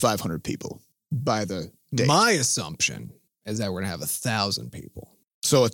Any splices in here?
yes; 1 cut; at 1.0 s

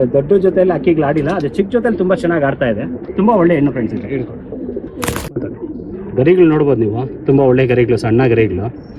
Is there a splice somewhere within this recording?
no; 0 cuts

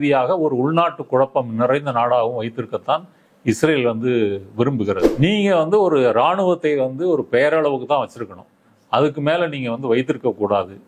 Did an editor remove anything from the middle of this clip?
yes; 1 cut; at 5.1 s

